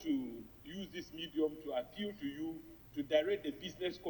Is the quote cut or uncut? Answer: uncut